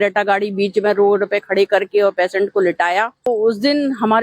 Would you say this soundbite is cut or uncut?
cut